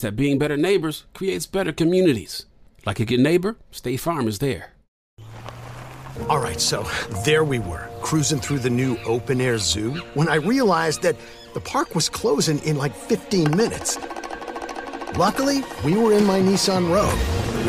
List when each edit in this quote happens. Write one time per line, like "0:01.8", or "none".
0:05.0